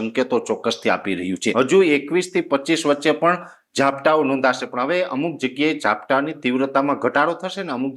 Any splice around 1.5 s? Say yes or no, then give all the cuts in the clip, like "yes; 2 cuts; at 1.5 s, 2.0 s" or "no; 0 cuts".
yes; 1 cut; at 1.5 s